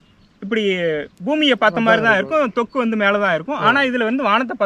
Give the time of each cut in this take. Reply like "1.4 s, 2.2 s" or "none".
none